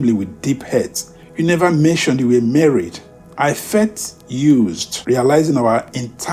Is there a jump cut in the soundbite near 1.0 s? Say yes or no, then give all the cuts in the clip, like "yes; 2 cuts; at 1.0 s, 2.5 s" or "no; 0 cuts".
no; 0 cuts